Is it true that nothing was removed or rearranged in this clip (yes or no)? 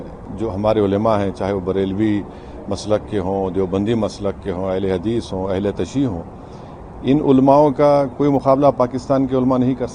yes